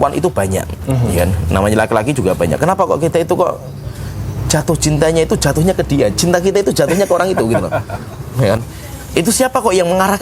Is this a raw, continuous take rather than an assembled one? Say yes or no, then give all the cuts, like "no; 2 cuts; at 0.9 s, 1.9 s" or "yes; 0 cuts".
yes; 0 cuts